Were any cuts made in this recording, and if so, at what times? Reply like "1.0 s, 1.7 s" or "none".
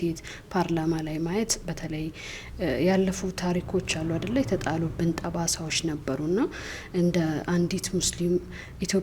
none